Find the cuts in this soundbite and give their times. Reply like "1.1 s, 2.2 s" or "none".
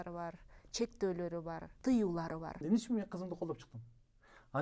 1.7 s, 2.6 s

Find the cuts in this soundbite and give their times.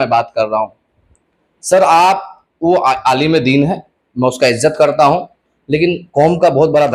none

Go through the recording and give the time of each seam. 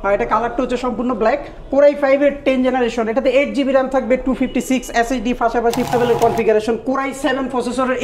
5.9 s

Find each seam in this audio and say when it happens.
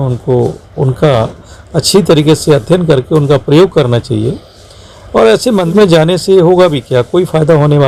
none

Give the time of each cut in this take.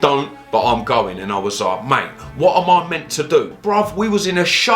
3.5 s

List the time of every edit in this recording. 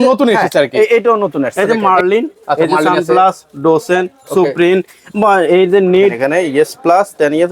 1.7 s, 6.2 s

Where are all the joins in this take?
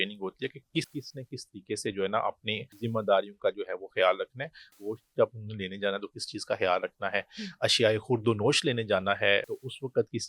2.7 s, 4.7 s, 9.5 s

